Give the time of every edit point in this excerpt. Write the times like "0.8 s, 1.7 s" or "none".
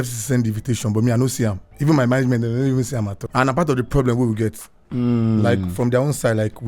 3.2 s